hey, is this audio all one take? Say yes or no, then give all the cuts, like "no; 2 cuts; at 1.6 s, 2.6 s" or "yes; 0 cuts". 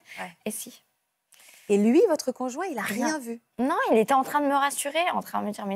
no; 1 cut; at 3.5 s